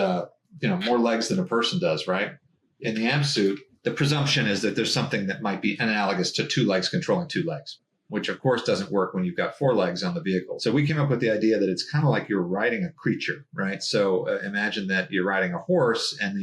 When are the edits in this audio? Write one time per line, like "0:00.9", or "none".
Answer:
0:02.5
0:03.7
0:07.8